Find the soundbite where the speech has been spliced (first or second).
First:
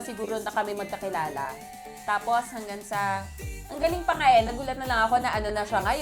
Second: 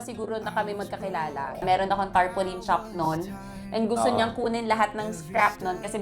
second